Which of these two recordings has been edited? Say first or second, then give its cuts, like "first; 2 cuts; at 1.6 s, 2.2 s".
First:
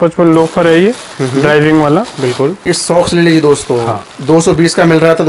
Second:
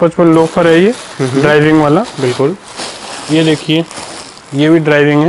first; 1 cut; at 2.6 s